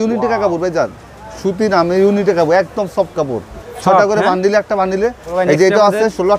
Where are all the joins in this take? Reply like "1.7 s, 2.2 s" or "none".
5.2 s